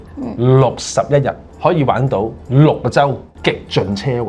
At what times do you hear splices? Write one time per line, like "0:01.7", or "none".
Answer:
0:01.5
0:02.4
0:03.3